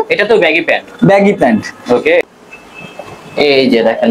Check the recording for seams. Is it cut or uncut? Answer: cut